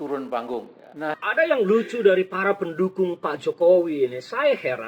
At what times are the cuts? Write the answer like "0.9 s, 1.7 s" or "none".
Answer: 1.2 s